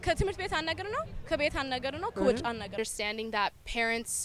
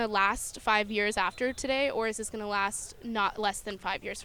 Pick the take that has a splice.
first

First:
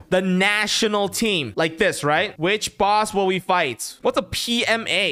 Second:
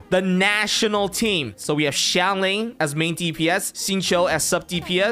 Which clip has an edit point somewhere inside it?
first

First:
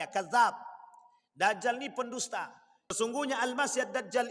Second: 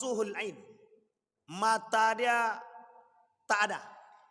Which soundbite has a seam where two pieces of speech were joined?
first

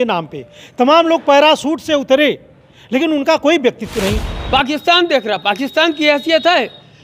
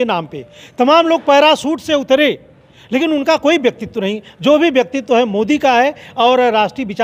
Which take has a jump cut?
first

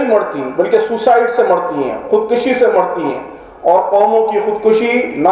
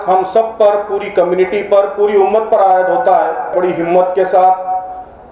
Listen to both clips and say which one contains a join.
second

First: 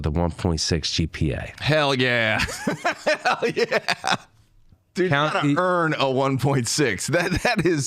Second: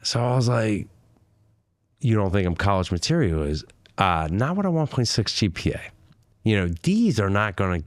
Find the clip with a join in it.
first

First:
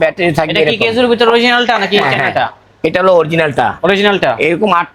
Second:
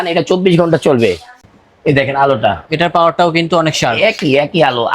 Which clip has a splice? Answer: second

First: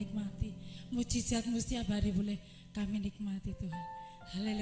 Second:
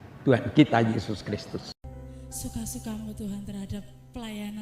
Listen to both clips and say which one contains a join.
second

